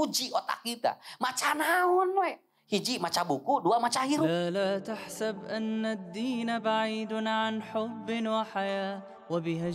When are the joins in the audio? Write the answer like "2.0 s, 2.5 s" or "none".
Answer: 4.3 s